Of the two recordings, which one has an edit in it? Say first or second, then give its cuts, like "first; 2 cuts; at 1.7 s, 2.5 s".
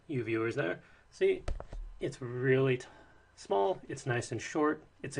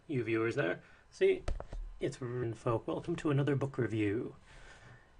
first; 1 cut; at 2.4 s